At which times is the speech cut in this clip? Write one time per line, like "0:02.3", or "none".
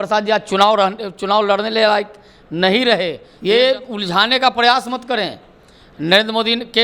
0:03.3